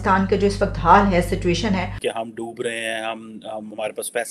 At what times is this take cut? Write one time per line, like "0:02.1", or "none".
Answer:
0:02.0